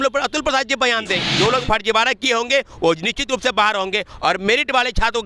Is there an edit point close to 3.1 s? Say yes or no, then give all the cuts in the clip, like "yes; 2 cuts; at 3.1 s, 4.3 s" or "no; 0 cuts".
no; 1 cut; at 1.2 s